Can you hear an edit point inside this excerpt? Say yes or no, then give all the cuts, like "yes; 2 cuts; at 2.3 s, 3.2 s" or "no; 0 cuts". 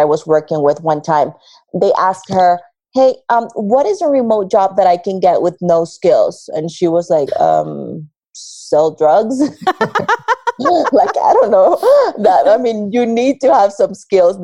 no; 0 cuts